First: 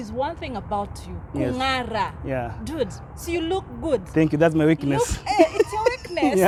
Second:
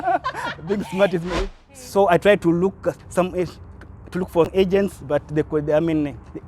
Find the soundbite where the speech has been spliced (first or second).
second